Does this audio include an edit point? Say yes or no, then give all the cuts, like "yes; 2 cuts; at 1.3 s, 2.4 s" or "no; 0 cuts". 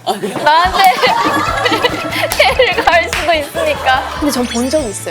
yes; 1 cut; at 4.1 s